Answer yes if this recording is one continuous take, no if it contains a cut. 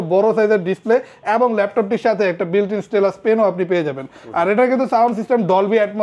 yes